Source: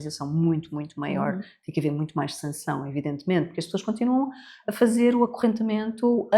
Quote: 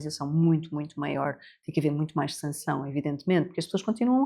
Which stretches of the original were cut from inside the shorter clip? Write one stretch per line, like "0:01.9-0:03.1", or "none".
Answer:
none